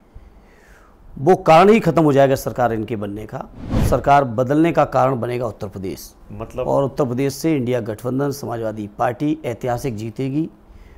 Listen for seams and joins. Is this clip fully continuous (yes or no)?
no